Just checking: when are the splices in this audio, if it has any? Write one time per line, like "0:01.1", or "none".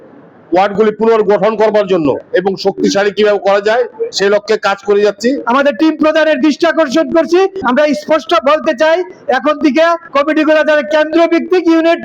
0:05.4

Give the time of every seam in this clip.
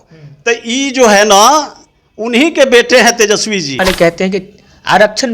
0:03.8

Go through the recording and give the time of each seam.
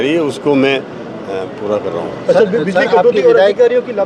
none

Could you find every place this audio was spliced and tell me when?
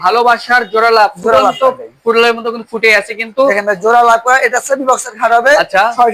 none

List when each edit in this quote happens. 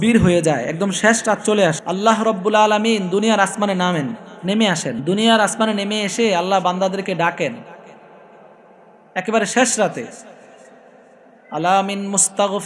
0:01.8
0:05.0

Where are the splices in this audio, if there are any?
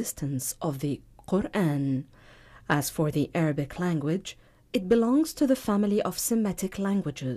0:06.5

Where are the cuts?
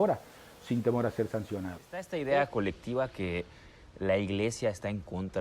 0:02.1

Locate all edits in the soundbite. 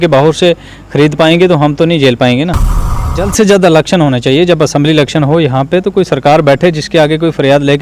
0:03.0

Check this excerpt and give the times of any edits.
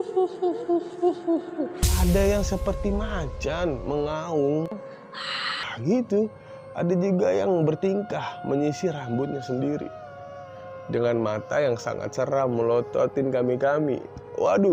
0:01.9

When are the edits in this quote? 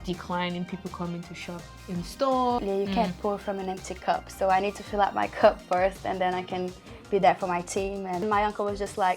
0:02.6
0:08.2

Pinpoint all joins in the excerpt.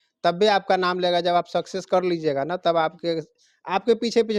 none

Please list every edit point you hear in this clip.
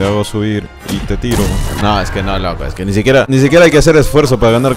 0:01.7
0:03.3

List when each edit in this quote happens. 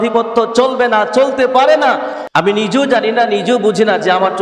0:02.1

